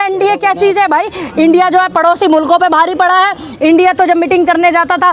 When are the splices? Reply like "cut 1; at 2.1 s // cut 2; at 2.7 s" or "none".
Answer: none